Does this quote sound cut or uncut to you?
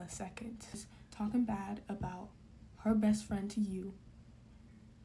cut